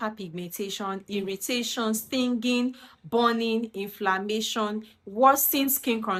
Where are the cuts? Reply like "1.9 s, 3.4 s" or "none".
none